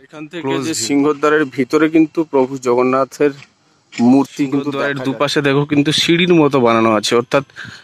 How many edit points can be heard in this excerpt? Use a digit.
1